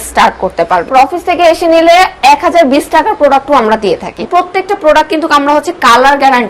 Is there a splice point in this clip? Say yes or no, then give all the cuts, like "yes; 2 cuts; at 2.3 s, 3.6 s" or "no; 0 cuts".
yes; 2 cuts; at 0.9 s, 4.2 s